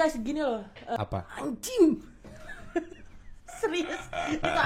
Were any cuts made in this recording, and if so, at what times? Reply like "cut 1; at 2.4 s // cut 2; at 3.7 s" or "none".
cut 1; at 1.0 s